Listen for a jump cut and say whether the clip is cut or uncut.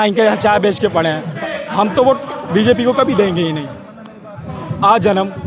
cut